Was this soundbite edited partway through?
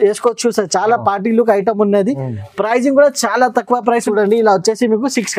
yes; 1 cut; at 4.1 s

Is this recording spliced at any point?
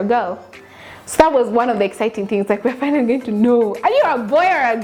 no; 0 cuts

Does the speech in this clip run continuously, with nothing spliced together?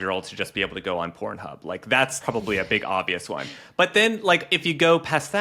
no; 1 cut; at 2.2 s

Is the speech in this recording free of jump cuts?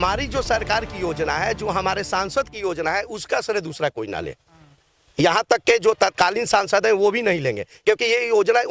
yes; 0 cuts

